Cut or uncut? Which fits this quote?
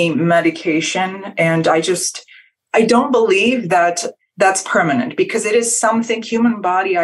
cut